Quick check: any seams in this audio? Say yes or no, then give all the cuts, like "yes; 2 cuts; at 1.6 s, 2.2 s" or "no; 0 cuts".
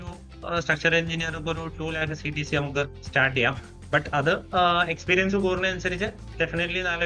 no; 0 cuts